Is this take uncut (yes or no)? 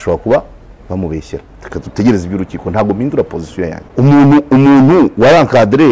no